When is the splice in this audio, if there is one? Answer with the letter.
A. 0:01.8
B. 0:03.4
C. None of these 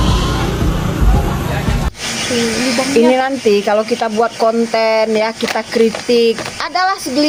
C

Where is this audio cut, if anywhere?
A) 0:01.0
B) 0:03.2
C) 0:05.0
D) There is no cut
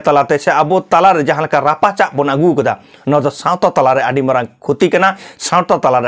D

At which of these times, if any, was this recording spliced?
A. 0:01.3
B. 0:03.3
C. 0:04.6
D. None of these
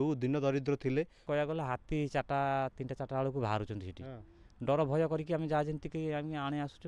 A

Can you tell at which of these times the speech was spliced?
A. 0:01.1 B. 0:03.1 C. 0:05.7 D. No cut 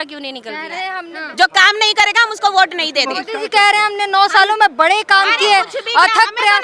A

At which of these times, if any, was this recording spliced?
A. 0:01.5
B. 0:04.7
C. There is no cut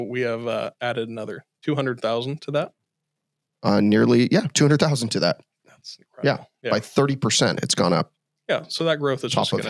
A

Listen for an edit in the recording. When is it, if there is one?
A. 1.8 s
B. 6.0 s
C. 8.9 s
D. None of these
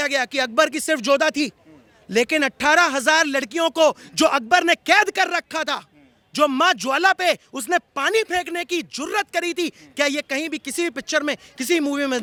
D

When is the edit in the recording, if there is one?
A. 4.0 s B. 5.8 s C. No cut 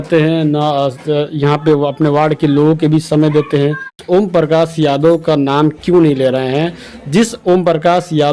A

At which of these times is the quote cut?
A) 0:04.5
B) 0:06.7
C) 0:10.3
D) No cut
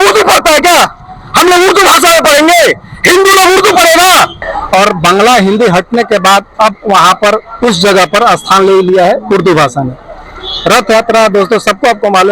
A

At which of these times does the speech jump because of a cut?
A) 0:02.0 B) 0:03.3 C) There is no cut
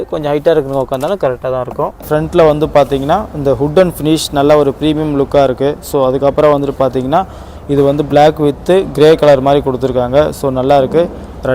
A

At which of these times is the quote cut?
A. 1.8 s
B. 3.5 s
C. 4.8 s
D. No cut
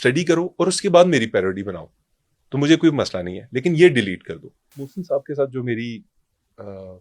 C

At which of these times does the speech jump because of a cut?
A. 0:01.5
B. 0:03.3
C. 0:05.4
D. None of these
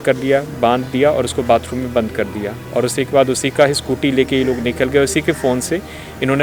D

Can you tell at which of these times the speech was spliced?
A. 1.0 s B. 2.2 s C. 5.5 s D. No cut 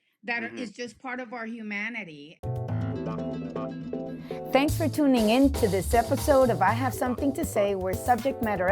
B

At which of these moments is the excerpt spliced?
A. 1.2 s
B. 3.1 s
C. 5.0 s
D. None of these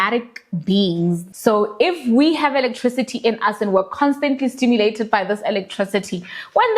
A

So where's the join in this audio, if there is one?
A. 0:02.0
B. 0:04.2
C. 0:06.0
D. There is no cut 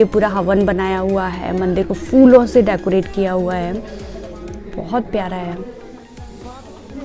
D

